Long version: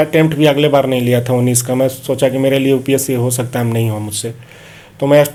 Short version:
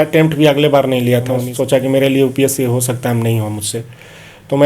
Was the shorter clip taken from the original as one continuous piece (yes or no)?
no